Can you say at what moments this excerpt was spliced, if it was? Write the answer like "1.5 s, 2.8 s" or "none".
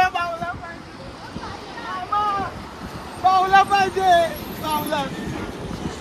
none